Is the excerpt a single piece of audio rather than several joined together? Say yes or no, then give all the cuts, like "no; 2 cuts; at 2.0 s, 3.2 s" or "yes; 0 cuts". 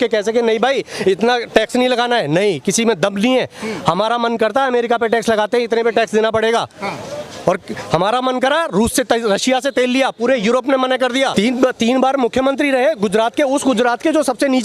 no; 1 cut; at 11.3 s